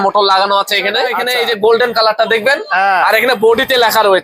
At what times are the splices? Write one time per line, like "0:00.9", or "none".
0:01.2